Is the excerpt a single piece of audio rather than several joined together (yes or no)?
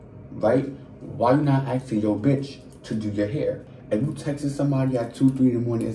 no